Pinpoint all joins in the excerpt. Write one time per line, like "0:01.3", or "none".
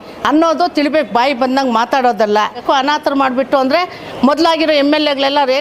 0:02.6